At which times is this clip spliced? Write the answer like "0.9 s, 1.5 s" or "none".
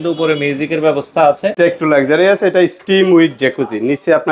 1.6 s